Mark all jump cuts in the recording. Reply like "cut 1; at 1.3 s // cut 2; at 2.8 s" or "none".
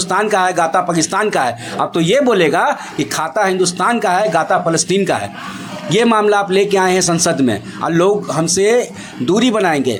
none

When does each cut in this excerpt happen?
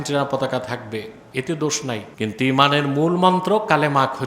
cut 1; at 2.1 s

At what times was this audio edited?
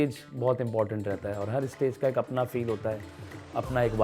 none

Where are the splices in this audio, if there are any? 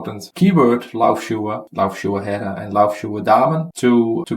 cut 1; at 1.7 s

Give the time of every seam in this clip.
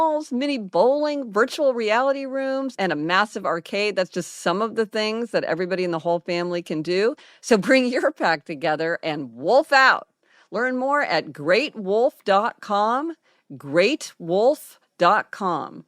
cut 1; at 7.3 s

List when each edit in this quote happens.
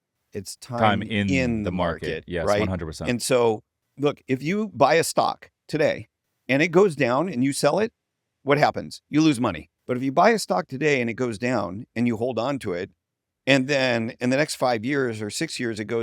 cut 1; at 3.8 s // cut 2; at 9.7 s

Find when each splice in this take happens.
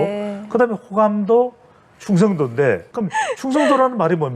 cut 1; at 2.9 s

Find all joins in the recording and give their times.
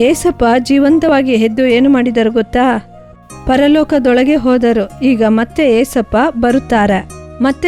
none

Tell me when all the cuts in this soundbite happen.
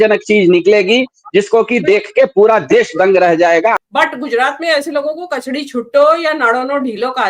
cut 1; at 3.8 s

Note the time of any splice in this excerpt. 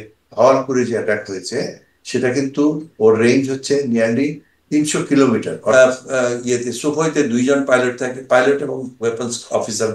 cut 1; at 5.7 s

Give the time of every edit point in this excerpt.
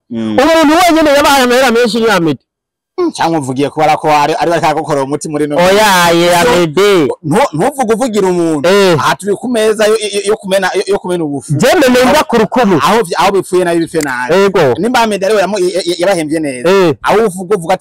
none

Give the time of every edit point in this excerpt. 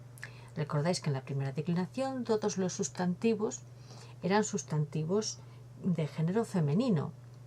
cut 1; at 1.7 s

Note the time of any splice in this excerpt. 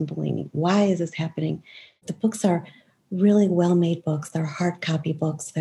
cut 1; at 2.1 s

